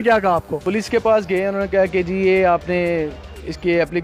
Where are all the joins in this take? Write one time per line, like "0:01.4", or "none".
none